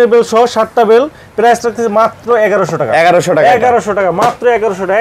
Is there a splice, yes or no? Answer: no